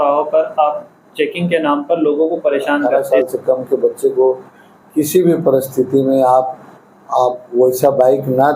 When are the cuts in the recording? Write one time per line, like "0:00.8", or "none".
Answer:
0:02.9